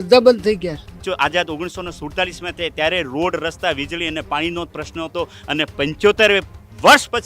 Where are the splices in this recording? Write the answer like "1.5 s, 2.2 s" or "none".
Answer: 1.0 s